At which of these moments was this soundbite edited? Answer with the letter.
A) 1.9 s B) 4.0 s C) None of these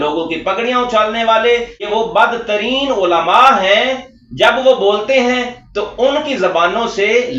A